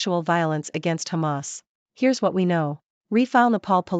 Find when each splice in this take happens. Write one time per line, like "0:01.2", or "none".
0:02.9